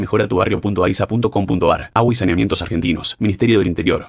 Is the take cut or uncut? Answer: uncut